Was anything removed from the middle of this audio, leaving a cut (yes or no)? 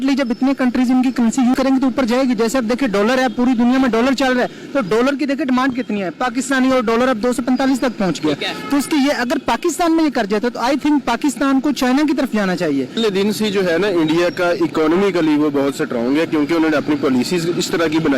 yes